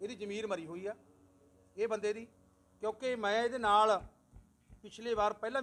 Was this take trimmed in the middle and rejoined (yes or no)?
no